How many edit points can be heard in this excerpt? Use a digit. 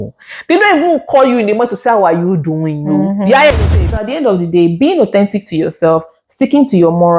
1